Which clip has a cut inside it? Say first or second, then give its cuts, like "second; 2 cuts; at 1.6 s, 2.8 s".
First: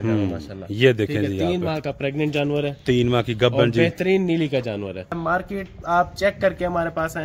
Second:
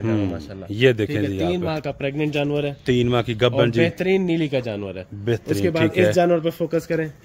first; 1 cut; at 5.2 s